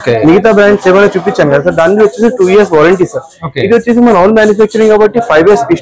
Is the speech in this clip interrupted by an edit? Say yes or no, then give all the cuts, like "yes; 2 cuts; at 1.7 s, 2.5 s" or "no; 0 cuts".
no; 0 cuts